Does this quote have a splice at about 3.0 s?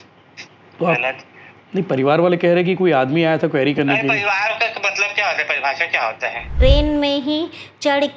no; 1 cut; at 6.5 s

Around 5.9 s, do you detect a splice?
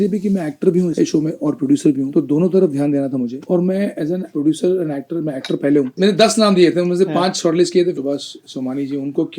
yes; 3 cuts; at 0.9 s, 5.9 s, 7.9 s

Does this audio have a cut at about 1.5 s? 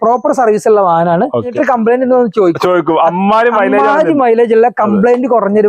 yes; 1 cut; at 1.5 s

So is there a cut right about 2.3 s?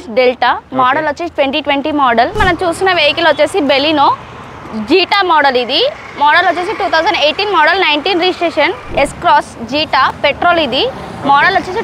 yes; 2 cuts; at 2.3 s, 8.9 s

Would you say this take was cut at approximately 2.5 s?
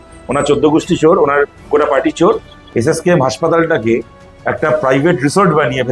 yes; 1 cut; at 2.5 s

